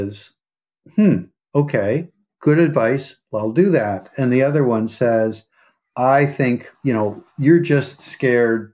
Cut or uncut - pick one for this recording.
uncut